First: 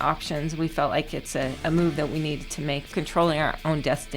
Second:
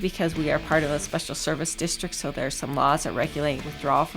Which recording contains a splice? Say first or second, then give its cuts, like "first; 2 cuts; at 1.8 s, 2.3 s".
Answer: first; 2 cuts; at 1.6 s, 2.9 s